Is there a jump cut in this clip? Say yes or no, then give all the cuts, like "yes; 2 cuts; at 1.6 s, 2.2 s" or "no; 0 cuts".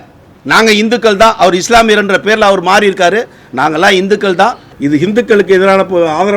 yes; 1 cut; at 4.7 s